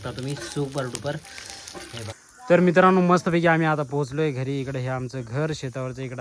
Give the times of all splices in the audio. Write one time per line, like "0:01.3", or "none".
0:02.2